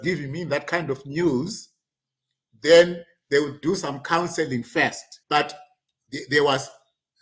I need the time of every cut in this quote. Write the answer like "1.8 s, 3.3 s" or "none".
5.1 s